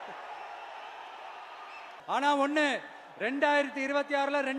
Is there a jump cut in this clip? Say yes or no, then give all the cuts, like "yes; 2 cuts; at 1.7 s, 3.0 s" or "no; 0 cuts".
yes; 1 cut; at 1.9 s